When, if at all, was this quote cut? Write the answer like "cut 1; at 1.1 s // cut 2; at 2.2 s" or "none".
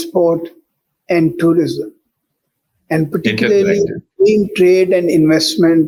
none